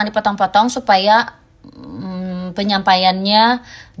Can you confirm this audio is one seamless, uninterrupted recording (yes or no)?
yes